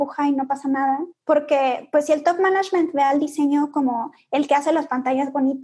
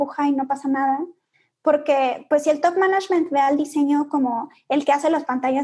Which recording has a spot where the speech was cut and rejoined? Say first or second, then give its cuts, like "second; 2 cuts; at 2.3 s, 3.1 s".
first; 1 cut; at 1.1 s